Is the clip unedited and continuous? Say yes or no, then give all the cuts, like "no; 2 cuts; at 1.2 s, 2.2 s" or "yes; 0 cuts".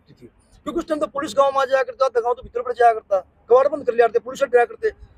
yes; 0 cuts